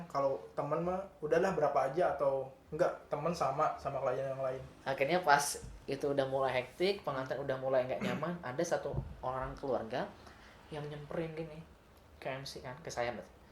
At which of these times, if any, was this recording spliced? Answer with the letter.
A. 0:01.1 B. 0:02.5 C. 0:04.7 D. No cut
C